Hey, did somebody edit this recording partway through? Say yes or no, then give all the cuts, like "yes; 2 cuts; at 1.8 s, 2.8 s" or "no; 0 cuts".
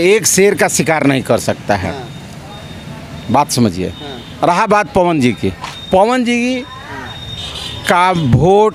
no; 0 cuts